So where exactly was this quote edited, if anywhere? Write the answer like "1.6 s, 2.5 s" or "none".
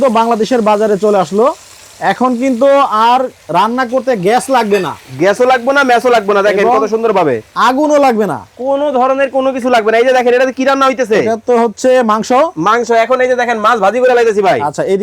none